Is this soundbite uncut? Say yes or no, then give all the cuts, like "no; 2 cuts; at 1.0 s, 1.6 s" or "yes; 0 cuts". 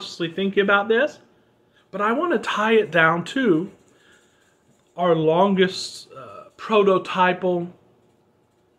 yes; 0 cuts